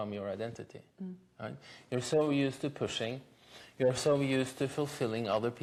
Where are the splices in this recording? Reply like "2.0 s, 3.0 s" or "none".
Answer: none